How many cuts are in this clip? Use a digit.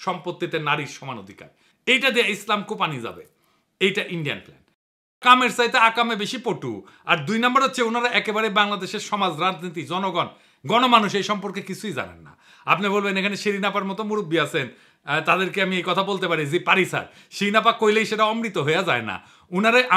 1